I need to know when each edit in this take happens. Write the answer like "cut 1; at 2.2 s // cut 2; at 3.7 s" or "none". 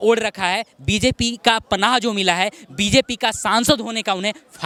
none